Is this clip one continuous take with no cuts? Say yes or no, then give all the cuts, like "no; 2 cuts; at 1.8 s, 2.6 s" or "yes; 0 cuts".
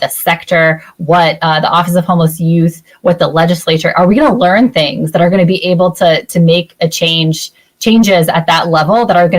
yes; 0 cuts